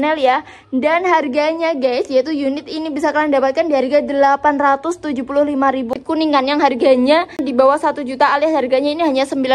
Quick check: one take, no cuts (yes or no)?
no